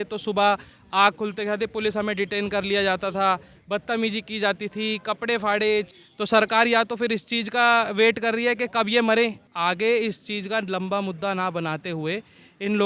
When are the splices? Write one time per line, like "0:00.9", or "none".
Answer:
0:05.9
0:09.4